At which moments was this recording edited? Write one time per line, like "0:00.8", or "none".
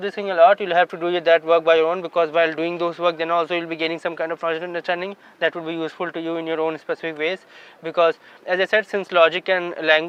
none